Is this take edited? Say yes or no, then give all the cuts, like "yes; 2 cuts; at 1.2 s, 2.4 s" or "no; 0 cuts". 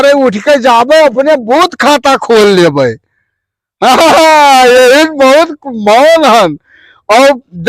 no; 0 cuts